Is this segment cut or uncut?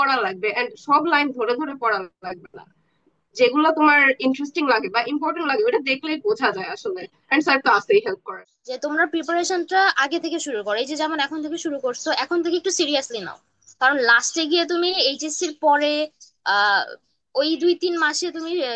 cut